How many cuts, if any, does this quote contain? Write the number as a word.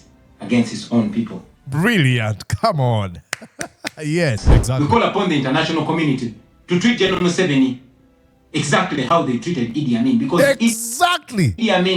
two